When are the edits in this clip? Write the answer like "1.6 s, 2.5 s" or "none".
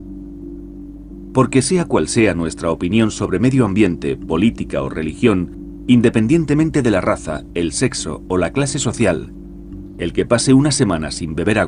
1.1 s